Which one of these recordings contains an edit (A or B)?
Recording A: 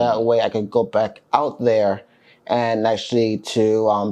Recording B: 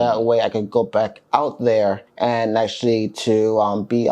B